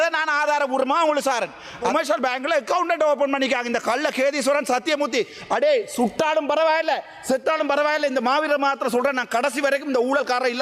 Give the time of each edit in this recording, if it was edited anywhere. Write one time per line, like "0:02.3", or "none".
0:01.9